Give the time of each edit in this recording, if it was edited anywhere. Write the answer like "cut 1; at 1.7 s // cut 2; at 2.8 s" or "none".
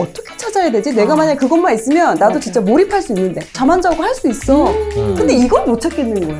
cut 1; at 3.5 s